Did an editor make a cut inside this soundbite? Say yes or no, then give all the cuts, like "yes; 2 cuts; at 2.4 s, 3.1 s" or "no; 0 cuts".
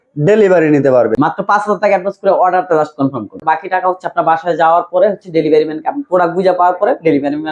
yes; 2 cuts; at 1.2 s, 3.4 s